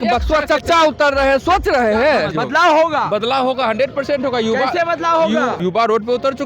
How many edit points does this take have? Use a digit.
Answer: 2